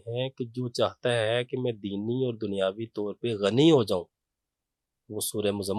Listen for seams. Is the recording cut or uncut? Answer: uncut